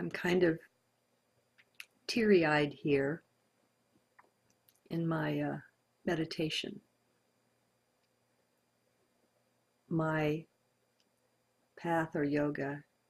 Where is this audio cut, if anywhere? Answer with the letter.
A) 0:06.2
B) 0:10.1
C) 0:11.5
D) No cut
A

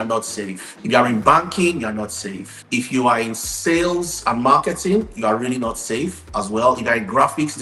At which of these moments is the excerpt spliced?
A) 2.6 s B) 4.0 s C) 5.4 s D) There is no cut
D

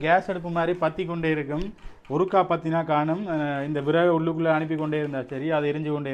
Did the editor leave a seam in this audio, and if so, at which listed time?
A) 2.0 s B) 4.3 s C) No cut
C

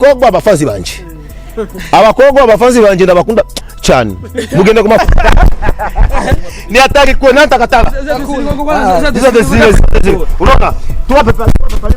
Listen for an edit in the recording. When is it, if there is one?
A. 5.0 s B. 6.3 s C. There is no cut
A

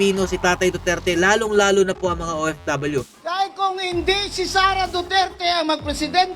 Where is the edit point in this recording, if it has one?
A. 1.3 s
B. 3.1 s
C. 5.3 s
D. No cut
B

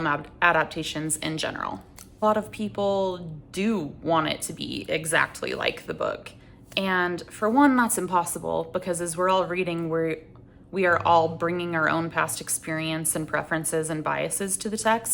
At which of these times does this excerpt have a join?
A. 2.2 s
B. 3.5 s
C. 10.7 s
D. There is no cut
A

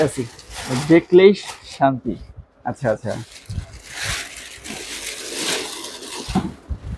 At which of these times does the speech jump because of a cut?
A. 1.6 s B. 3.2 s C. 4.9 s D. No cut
D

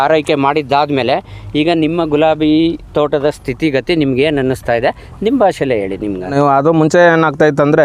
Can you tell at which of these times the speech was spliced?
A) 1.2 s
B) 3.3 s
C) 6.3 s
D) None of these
C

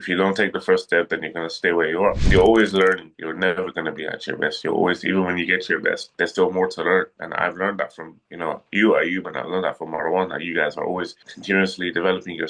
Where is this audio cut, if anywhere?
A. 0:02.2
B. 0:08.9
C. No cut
A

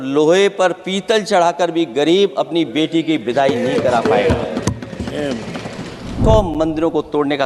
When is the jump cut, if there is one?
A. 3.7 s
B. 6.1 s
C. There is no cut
B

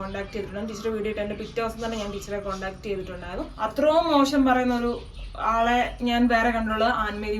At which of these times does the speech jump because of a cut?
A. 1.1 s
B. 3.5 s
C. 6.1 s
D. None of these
B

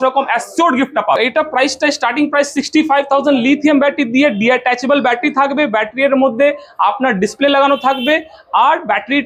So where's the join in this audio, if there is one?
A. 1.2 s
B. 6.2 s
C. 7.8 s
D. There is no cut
A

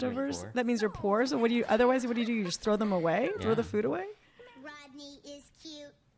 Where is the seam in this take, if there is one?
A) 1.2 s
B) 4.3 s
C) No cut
B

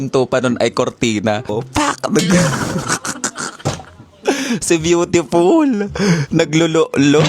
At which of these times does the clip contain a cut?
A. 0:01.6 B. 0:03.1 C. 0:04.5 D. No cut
A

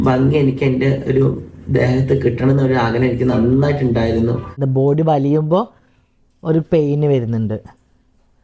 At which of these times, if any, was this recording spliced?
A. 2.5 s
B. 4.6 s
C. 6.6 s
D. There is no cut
B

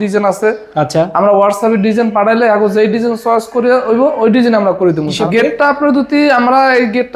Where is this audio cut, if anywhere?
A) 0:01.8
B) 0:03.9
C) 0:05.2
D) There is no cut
C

